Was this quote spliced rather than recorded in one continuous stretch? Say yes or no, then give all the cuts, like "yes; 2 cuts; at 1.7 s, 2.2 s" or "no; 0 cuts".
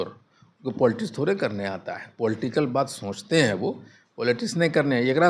no; 0 cuts